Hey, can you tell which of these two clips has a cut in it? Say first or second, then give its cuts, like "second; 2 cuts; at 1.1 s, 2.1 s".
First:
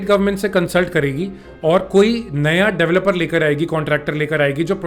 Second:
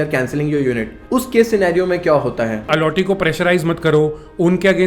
second; 2 cuts; at 0.9 s, 2.7 s